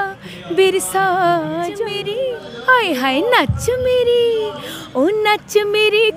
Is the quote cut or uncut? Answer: cut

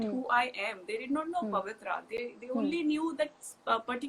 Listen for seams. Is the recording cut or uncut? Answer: uncut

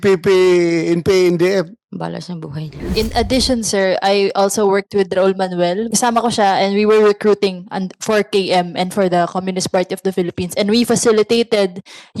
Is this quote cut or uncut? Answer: cut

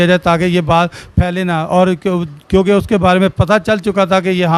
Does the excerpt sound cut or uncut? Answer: uncut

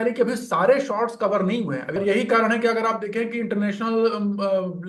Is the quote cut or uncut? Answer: cut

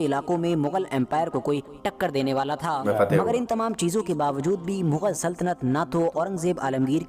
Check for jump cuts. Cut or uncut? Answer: cut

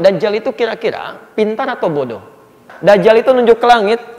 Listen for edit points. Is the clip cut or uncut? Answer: cut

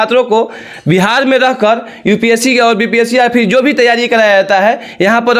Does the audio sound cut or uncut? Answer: uncut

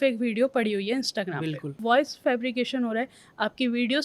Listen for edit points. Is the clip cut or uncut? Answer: cut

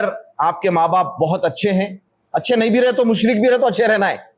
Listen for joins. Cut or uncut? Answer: uncut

